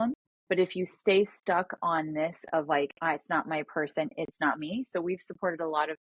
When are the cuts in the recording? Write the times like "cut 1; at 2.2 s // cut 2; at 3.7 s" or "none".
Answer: none